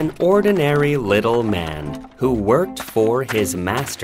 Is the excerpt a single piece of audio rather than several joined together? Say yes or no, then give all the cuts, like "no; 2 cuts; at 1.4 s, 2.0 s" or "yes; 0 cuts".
yes; 0 cuts